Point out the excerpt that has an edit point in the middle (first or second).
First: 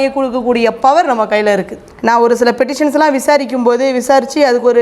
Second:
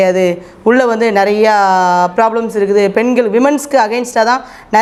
first